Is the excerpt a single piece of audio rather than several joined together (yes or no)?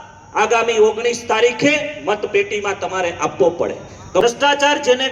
no